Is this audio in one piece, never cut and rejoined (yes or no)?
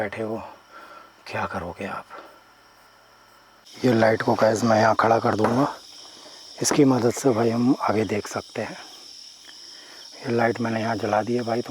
yes